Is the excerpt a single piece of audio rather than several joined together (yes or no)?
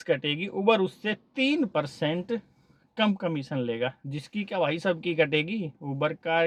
yes